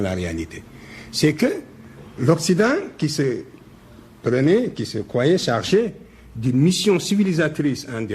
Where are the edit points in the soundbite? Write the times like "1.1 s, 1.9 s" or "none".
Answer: none